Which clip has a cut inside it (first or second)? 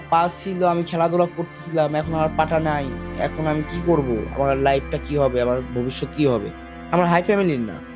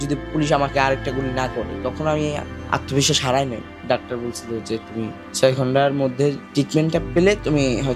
second